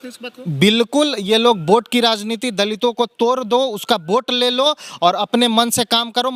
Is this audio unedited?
yes; 0 cuts

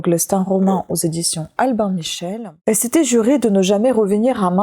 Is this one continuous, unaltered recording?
no; 1 cut; at 2.3 s

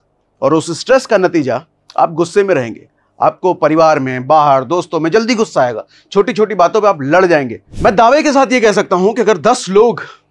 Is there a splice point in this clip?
yes; 1 cut; at 7.6 s

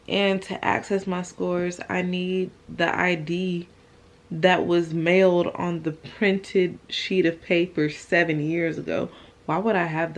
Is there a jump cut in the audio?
no; 0 cuts

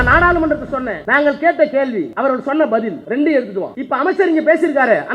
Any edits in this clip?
yes; 4 cuts; at 1.0 s, 2.1 s, 3.0 s, 3.8 s

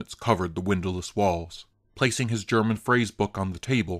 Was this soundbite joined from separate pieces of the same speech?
yes; 1 cut; at 1.7 s

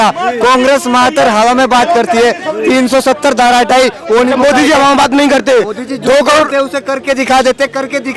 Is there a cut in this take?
no; 0 cuts

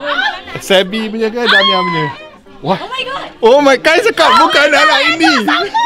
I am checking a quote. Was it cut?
no; 0 cuts

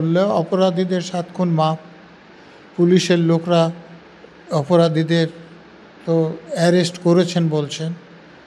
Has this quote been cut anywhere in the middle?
no; 0 cuts

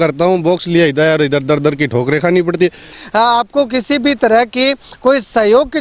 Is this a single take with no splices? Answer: no; 1 cut; at 3.0 s

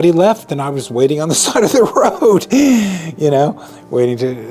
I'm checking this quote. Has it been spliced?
no; 0 cuts

